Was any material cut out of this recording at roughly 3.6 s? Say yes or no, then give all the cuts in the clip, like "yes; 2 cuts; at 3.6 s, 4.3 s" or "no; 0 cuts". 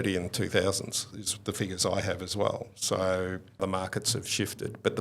yes; 1 cut; at 3.6 s